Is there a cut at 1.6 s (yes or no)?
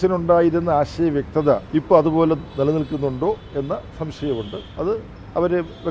yes